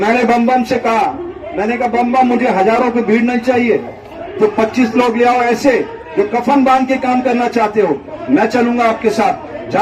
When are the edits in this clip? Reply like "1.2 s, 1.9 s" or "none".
none